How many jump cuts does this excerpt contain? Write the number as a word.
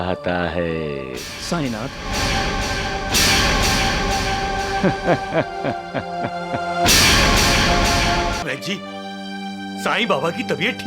one